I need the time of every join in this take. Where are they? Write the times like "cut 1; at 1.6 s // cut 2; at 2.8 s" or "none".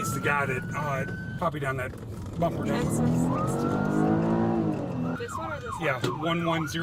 cut 1; at 1.3 s // cut 2; at 5.2 s